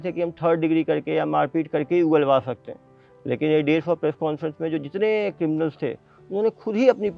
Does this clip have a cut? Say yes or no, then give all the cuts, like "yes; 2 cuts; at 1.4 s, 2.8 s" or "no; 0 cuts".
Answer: no; 0 cuts